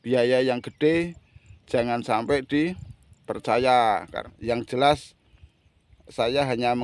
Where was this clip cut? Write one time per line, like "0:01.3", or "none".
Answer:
0:04.1